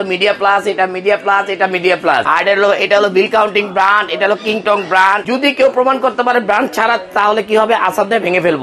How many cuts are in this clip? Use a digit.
2